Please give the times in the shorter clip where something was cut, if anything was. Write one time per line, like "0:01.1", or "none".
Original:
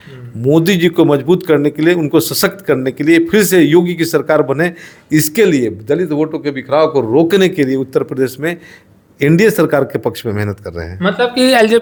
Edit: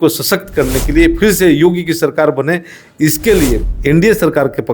0:03.7